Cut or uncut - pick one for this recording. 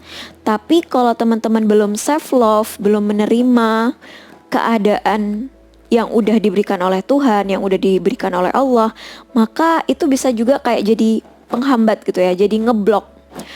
uncut